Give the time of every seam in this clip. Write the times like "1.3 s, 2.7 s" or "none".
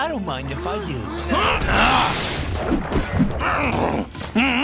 none